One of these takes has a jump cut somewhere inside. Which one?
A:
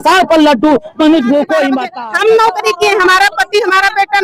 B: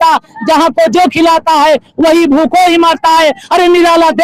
A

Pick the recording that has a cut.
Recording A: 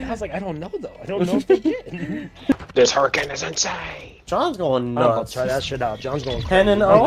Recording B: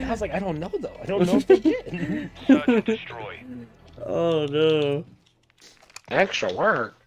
A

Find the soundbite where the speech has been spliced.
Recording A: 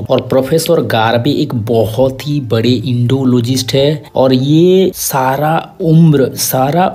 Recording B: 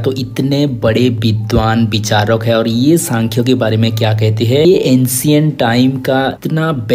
B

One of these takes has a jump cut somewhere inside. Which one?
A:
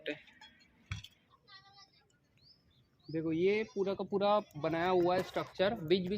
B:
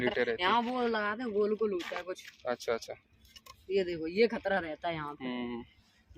A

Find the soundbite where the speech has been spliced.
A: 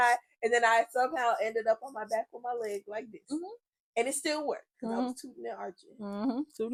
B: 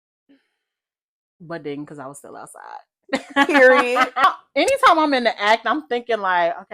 B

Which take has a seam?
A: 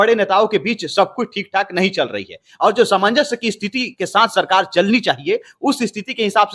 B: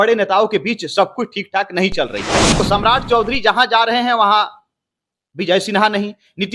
B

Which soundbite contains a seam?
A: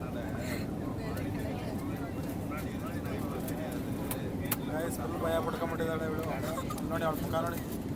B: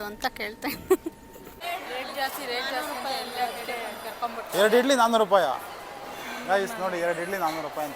B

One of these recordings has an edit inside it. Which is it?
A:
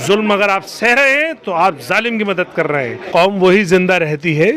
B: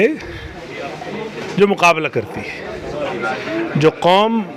A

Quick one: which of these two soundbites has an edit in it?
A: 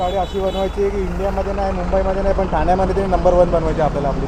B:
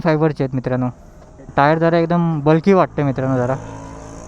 B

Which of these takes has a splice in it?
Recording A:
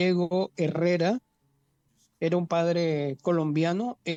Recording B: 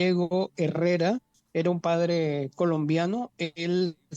B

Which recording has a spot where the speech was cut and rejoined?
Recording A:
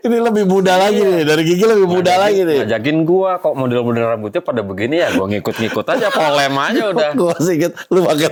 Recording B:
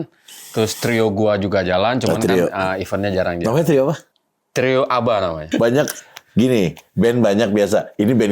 B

